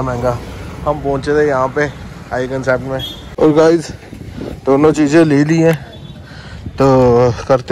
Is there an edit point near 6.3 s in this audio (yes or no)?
no